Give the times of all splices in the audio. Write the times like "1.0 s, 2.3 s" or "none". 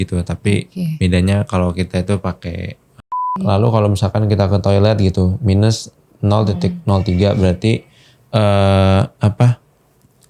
3.3 s

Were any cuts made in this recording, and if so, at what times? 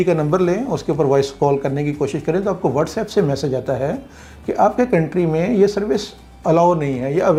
none

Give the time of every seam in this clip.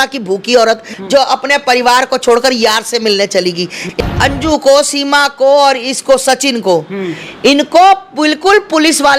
0.9 s, 3.9 s

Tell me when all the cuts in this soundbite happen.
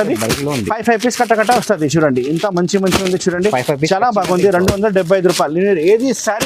none

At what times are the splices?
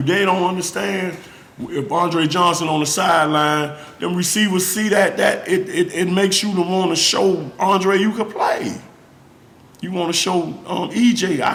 none

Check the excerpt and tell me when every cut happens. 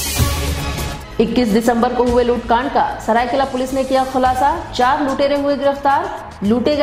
1.0 s

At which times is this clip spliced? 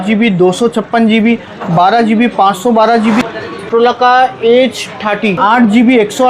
3.4 s, 5.4 s

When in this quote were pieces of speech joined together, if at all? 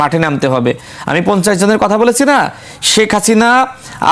none

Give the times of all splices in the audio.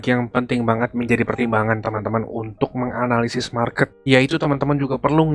none

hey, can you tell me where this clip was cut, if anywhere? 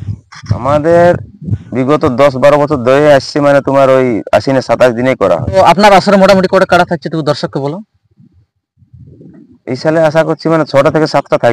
5.6 s

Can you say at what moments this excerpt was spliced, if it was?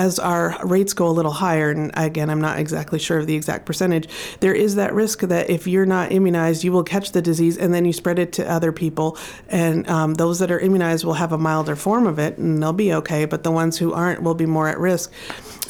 none

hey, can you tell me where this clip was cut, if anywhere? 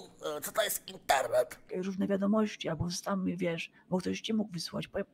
1.6 s

